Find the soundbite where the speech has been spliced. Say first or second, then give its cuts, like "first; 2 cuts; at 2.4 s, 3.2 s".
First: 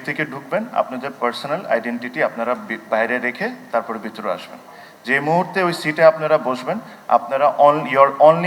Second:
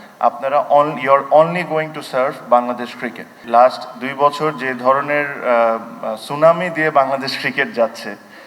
second; 1 cut; at 3.4 s